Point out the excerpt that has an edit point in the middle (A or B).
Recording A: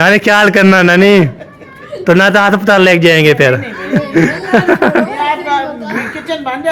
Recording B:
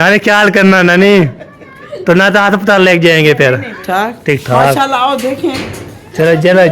B